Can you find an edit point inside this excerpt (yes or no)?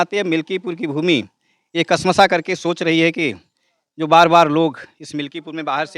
no